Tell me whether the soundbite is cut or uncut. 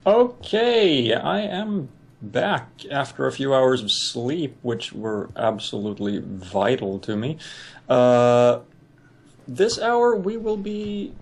uncut